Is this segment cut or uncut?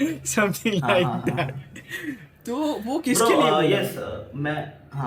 uncut